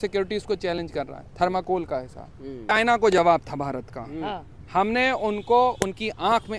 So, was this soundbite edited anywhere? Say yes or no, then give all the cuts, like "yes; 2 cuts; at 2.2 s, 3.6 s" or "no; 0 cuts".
yes; 1 cut; at 2.7 s